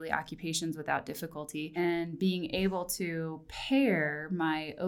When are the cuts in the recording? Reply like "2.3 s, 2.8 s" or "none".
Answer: 1.7 s